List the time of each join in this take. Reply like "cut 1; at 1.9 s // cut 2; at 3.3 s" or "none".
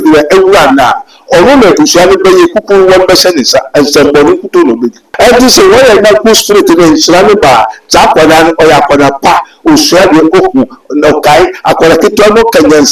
cut 1; at 5.0 s